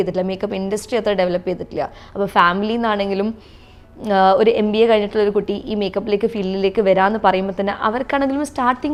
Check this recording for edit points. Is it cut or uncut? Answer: uncut